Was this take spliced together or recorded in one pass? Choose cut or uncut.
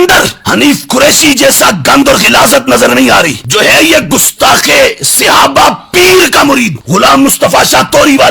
uncut